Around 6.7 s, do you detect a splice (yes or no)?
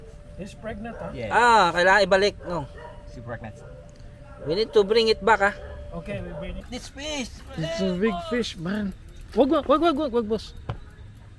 yes